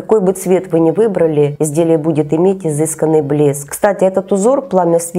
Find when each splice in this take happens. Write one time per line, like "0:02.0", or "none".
0:01.6
0:03.7